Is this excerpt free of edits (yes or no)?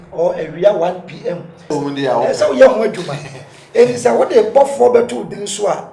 no